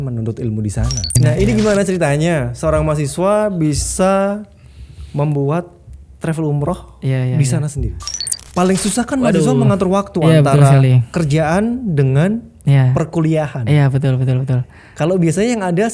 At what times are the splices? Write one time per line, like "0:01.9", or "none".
0:01.1
0:08.4